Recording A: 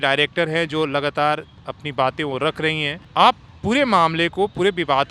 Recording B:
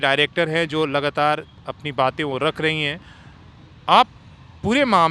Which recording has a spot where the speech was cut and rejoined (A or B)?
A